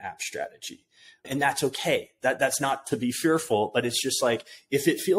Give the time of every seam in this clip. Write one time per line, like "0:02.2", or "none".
0:01.3